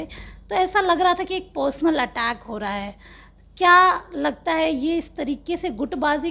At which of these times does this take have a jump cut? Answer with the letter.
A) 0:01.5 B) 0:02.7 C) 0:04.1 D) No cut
D